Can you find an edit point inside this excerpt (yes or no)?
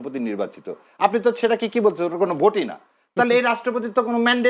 no